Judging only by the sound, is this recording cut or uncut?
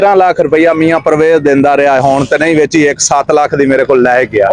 uncut